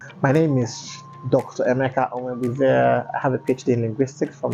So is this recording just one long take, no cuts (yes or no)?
yes